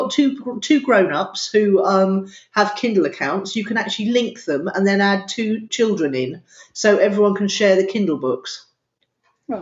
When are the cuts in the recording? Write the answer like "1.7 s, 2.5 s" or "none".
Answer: 5.7 s